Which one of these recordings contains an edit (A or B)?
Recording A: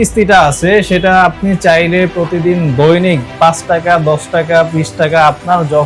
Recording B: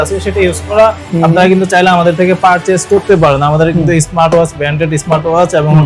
B